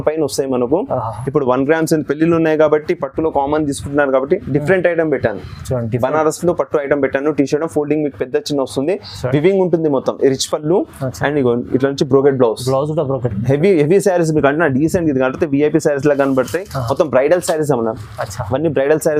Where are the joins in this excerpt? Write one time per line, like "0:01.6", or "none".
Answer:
none